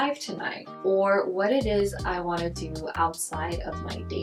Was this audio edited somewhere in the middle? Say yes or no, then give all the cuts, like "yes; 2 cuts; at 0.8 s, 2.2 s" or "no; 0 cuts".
no; 0 cuts